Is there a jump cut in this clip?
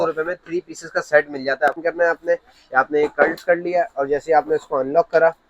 yes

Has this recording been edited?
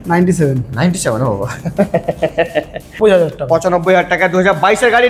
yes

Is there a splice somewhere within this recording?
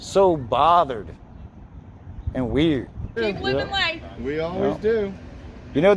yes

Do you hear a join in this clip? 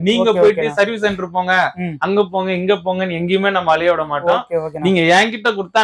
no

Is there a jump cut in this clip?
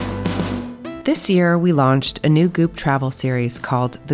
yes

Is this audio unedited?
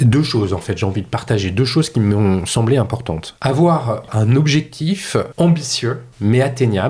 no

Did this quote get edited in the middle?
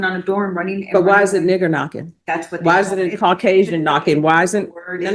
no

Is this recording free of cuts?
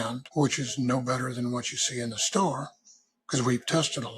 yes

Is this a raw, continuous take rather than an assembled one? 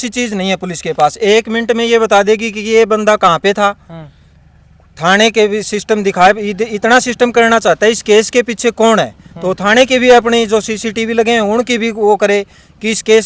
yes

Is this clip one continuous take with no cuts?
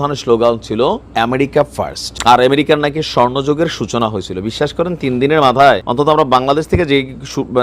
no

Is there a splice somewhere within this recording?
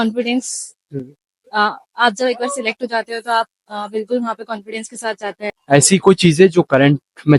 yes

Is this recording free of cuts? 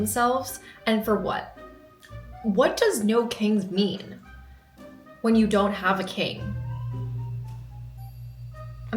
yes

